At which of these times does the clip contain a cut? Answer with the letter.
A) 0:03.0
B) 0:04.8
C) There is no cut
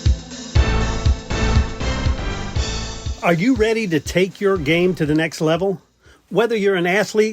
A